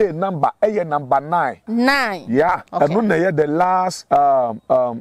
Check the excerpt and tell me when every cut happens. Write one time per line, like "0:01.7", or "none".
0:01.6
0:02.7
0:04.0